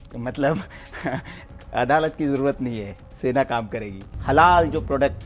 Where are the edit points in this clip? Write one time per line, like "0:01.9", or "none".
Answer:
0:04.1